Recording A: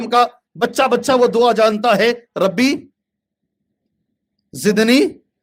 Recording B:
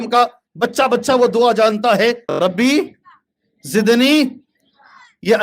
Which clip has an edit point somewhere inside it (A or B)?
B